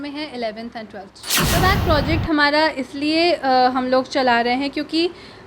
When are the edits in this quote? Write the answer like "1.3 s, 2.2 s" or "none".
1.5 s